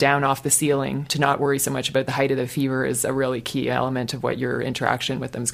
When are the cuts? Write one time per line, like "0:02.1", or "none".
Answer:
0:01.0